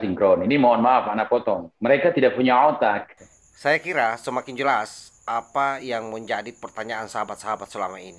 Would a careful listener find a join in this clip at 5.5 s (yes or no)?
no